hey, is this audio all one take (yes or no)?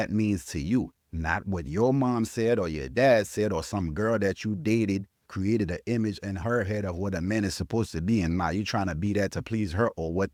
yes